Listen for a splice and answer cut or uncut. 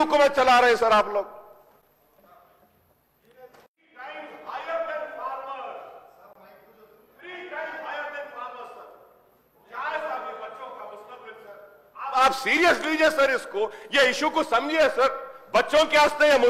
uncut